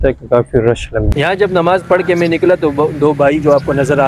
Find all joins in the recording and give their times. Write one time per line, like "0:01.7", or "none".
0:01.1